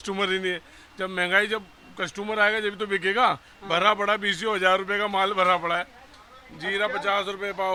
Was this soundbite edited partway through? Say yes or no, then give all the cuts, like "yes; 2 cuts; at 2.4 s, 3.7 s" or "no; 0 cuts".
no; 0 cuts